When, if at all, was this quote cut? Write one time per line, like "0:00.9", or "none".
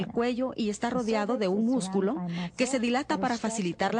none